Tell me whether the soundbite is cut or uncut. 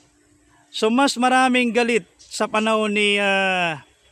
uncut